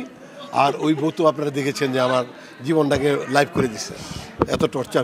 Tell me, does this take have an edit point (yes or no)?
no